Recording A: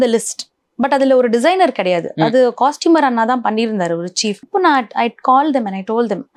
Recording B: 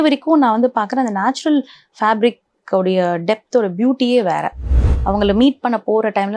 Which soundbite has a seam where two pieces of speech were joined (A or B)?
B